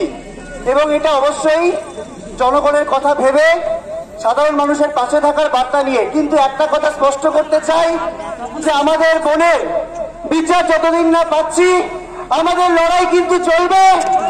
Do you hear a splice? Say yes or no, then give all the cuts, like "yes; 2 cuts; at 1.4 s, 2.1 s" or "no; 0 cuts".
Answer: no; 0 cuts